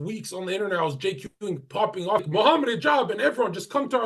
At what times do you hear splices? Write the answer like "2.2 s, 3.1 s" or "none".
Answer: 2.3 s

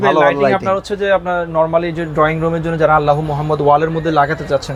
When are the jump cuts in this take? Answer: none

